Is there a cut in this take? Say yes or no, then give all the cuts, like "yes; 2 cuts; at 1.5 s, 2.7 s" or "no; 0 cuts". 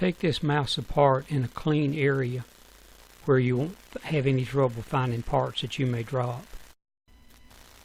yes; 1 cut; at 4.2 s